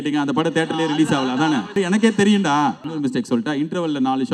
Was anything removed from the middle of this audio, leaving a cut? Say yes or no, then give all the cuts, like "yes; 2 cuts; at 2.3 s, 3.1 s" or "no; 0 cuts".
yes; 2 cuts; at 1.7 s, 2.9 s